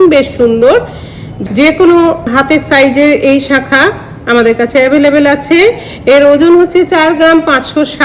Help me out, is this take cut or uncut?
uncut